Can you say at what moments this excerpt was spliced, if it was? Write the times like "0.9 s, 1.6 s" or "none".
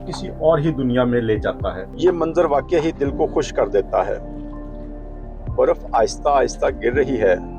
1.8 s